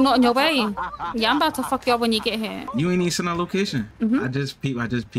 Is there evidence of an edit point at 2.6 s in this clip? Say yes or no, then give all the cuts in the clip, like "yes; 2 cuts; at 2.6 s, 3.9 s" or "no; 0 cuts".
yes; 2 cuts; at 2.6 s, 3.9 s